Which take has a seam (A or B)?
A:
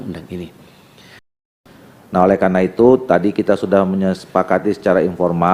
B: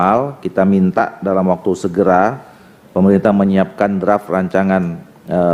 A